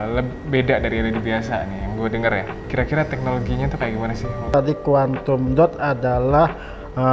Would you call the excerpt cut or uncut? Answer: cut